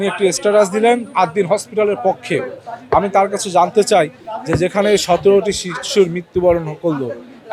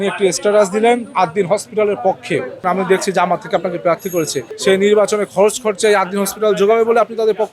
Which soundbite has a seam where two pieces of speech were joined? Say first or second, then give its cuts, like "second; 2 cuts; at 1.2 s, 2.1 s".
second; 2 cuts; at 2.6 s, 4.5 s